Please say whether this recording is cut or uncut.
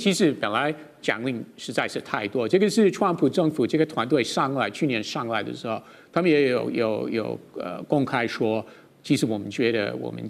uncut